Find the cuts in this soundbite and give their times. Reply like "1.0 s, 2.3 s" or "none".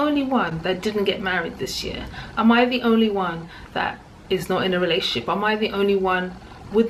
none